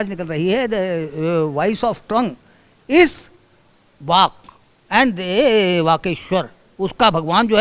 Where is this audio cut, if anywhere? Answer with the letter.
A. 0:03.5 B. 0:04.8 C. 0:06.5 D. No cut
D